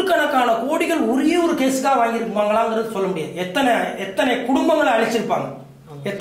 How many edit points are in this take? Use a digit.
0